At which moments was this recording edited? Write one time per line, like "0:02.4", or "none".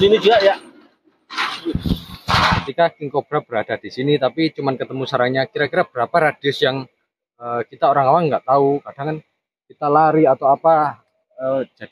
0:02.6

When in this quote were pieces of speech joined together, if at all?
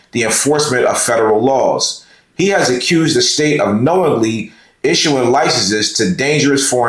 none

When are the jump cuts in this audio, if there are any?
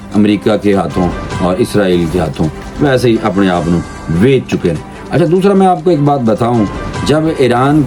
none

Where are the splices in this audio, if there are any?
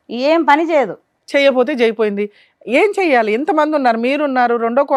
none

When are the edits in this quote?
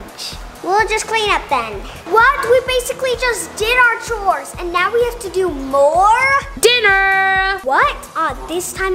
0:01.9
0:06.5

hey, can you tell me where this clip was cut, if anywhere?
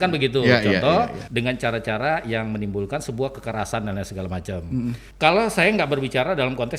0:01.2
0:05.1

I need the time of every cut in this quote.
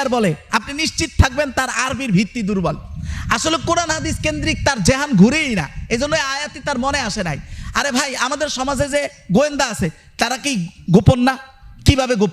none

